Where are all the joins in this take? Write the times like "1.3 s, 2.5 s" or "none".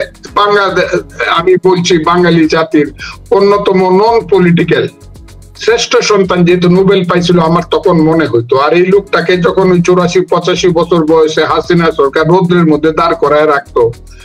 none